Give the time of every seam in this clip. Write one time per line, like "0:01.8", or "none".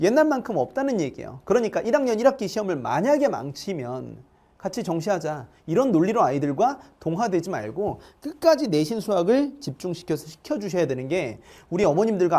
none